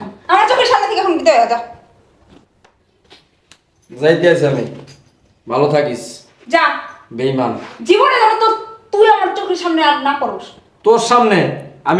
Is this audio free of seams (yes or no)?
yes